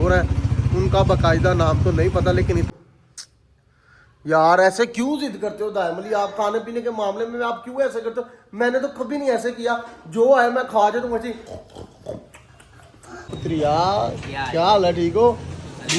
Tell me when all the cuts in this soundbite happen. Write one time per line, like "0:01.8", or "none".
0:02.7
0:13.4